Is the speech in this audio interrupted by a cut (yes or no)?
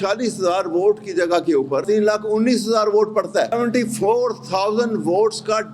yes